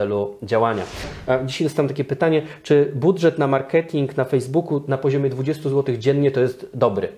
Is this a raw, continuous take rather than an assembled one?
no; 1 cut; at 1.1 s

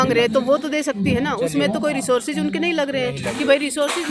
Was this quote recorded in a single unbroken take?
yes; 0 cuts

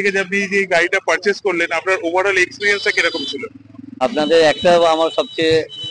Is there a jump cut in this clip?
no; 0 cuts

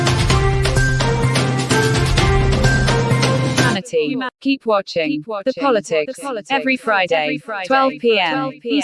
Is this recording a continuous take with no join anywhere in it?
yes; 0 cuts

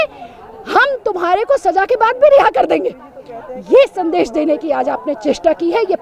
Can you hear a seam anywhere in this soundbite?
no; 0 cuts

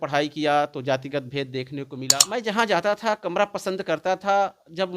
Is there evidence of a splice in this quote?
yes; 1 cut; at 2.1 s

